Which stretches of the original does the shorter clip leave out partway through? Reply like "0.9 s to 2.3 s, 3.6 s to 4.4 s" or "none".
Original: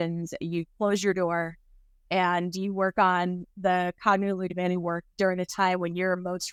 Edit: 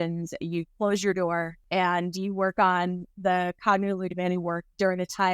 1.6 s to 2.0 s